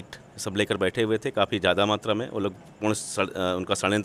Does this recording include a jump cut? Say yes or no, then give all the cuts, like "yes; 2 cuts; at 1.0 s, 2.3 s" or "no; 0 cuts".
no; 0 cuts